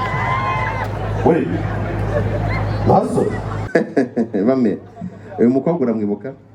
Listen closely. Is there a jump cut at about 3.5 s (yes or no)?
yes